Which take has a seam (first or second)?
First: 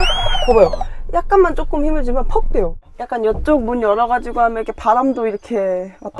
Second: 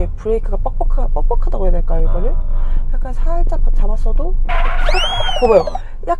first